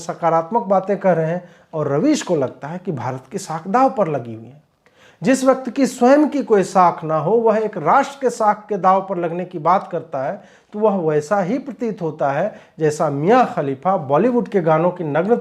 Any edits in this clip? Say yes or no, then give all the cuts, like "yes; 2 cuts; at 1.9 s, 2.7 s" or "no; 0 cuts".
no; 0 cuts